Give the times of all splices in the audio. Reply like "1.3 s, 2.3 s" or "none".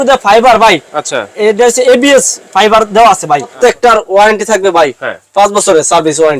3.5 s

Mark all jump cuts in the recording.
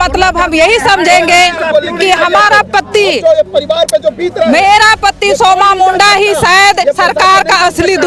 none

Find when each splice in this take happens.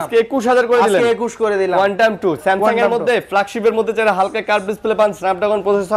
none

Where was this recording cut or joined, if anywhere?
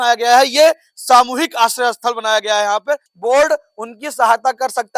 3.1 s

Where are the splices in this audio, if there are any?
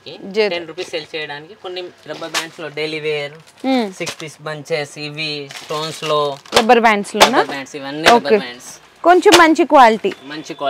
2.0 s, 6.4 s

